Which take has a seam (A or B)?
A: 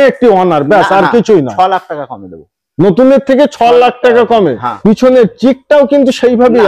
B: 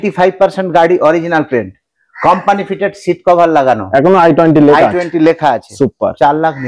A